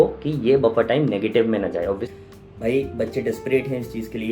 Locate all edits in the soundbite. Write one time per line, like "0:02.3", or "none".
0:02.0

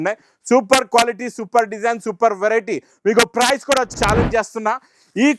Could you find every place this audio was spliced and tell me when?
0:03.9

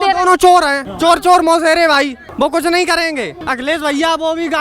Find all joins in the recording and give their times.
0:00.9
0:02.2
0:03.3

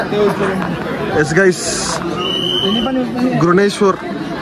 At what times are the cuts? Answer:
none

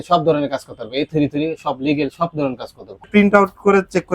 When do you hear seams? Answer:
0:03.0

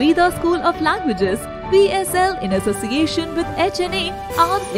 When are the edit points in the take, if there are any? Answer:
none

